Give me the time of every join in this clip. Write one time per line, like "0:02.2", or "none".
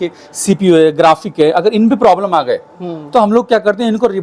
none